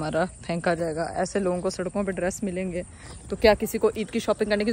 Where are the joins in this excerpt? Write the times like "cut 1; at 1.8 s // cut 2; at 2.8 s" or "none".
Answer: none